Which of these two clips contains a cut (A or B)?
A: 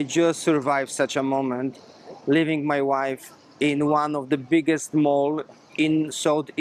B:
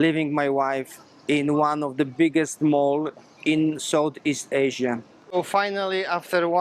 B